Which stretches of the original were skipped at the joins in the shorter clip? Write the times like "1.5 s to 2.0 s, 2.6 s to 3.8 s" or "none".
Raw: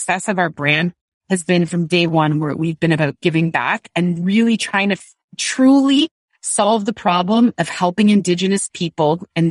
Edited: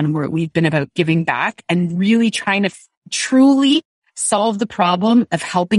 none